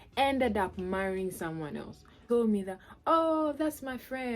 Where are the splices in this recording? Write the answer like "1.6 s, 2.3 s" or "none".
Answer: 2.3 s